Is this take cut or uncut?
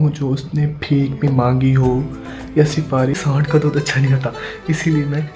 cut